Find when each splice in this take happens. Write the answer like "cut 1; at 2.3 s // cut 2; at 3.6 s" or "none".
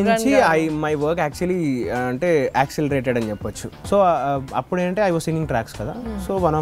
cut 1; at 3.7 s